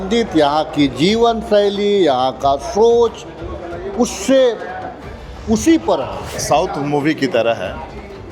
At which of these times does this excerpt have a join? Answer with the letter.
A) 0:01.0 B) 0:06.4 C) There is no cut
B